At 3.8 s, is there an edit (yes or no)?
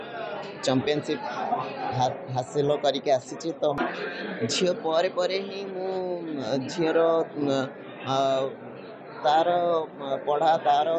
yes